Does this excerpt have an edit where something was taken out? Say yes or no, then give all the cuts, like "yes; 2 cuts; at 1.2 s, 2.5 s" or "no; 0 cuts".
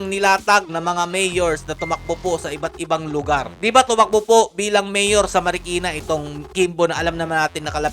yes; 1 cut; at 3.5 s